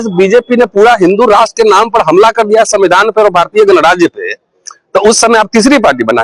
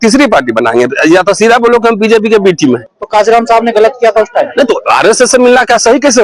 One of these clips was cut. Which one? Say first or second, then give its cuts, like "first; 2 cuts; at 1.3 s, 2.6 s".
second; 1 cut; at 2.9 s